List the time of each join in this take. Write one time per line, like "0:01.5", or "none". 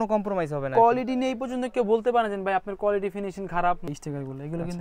0:03.9